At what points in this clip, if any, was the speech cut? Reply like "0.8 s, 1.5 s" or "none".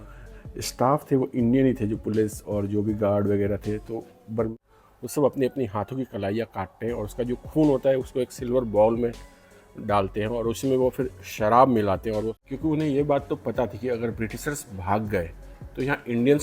4.5 s, 12.4 s